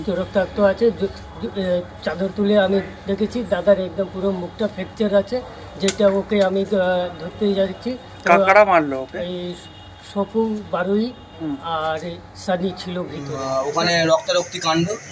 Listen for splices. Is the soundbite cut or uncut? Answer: cut